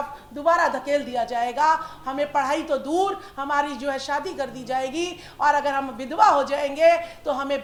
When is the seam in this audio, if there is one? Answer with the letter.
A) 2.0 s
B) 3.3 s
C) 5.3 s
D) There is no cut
D